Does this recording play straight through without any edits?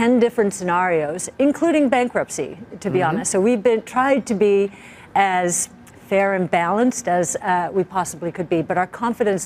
yes; 0 cuts

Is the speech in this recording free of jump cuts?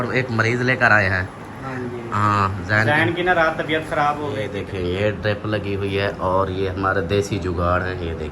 no; 1 cut; at 4.5 s

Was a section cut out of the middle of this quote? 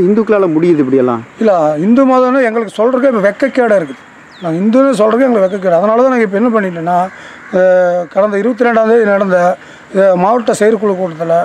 no; 0 cuts

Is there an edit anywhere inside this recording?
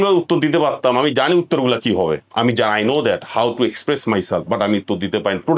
no; 0 cuts

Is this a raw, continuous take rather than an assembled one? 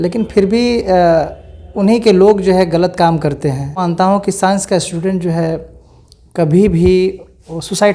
no; 1 cut; at 3.8 s

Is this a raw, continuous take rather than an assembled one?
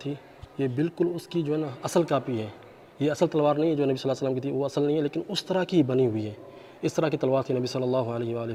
yes; 0 cuts

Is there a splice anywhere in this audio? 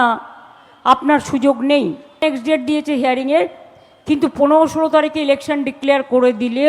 yes; 1 cut; at 2.2 s

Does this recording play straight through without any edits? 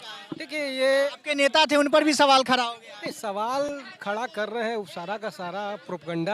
yes; 0 cuts

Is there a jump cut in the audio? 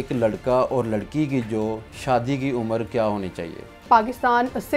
yes; 1 cut; at 3.7 s

